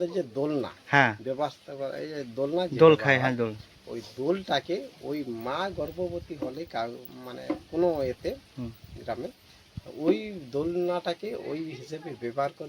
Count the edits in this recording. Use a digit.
0